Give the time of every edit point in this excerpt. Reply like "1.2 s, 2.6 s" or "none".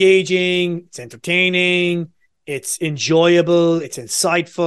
none

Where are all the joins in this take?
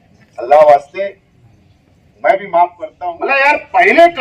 2.8 s

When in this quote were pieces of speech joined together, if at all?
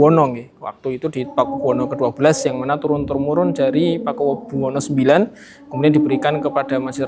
none

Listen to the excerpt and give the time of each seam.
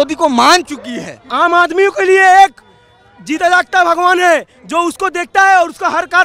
1.2 s

